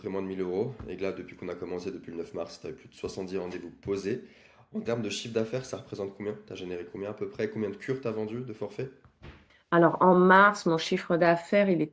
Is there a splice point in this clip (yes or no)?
no